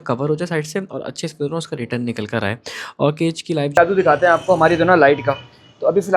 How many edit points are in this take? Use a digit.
1